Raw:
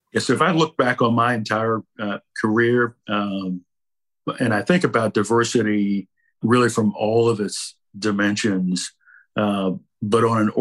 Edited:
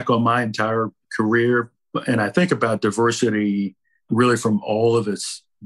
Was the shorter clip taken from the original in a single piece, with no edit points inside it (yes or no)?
no